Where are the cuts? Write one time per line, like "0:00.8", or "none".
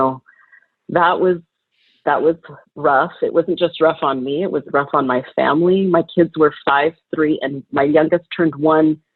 none